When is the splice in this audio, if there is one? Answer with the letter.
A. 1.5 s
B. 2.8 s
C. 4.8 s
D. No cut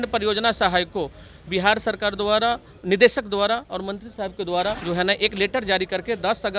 C